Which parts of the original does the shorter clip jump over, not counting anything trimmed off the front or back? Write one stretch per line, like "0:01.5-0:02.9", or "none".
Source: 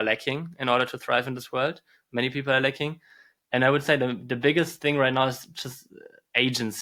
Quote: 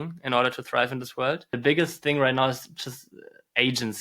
0:01.8-0:04.3